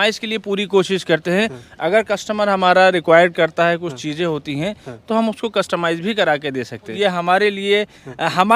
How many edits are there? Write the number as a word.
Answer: one